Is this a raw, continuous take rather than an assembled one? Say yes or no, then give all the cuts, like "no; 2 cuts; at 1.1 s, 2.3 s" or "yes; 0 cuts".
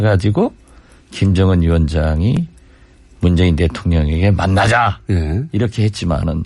no; 1 cut; at 2.0 s